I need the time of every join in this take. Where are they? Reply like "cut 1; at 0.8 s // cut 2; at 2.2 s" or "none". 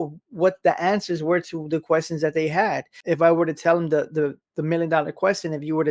none